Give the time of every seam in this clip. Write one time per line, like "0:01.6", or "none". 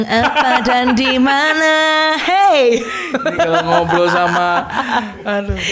none